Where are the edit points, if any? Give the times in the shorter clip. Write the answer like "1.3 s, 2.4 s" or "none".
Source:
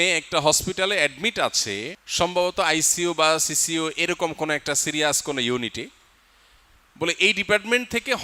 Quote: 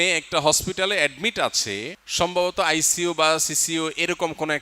none